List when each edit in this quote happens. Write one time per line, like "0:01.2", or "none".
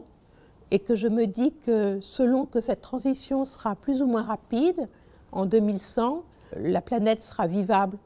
none